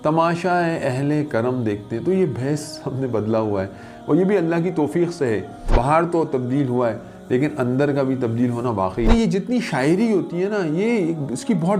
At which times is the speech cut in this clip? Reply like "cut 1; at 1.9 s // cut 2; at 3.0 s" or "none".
cut 1; at 5.6 s // cut 2; at 9.1 s